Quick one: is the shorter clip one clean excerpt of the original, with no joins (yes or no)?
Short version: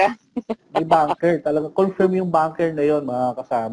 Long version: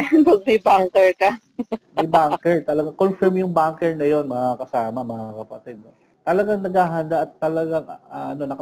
yes